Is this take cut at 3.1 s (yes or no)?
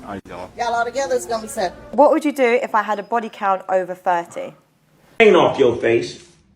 no